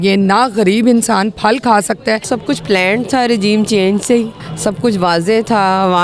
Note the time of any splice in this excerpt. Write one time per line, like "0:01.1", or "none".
0:02.2
0:04.4